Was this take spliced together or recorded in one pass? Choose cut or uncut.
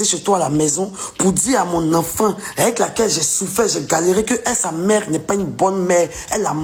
uncut